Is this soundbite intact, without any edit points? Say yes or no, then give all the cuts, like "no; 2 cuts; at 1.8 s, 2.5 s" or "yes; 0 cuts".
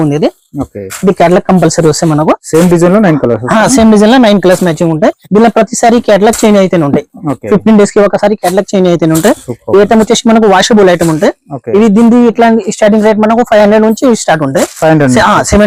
yes; 0 cuts